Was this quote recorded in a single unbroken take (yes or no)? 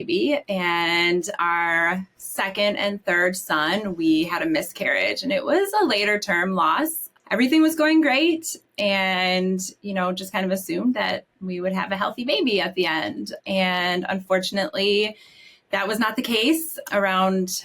no